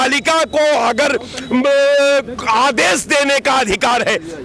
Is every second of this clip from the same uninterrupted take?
yes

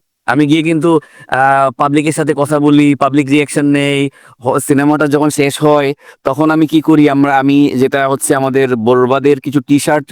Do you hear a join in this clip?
no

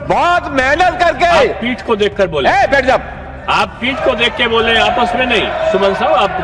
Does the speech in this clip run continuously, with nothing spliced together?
yes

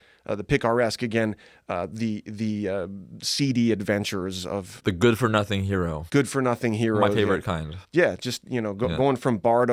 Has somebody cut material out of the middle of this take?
no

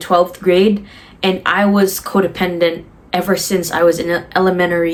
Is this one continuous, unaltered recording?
yes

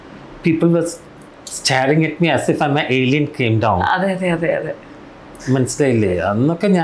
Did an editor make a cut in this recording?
no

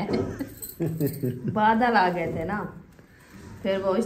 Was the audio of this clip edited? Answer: no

